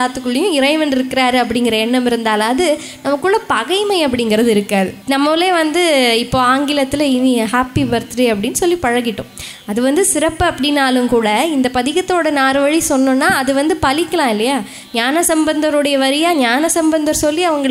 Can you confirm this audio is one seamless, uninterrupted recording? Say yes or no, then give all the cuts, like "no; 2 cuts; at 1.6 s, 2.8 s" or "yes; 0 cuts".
no; 1 cut; at 5.0 s